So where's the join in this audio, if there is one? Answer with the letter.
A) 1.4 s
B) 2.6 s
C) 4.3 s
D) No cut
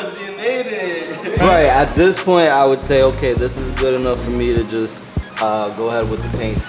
A